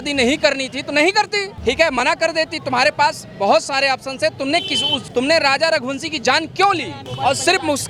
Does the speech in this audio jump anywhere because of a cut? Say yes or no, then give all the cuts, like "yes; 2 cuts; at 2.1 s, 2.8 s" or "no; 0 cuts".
no; 0 cuts